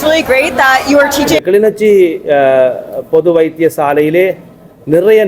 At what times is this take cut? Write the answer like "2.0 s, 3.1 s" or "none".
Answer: 1.3 s